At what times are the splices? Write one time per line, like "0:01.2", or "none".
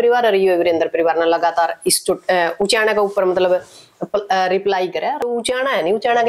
0:05.2